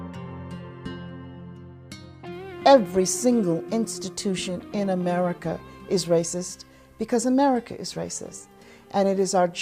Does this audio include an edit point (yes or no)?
yes